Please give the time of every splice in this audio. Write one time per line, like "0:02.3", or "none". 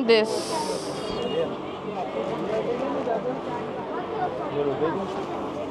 none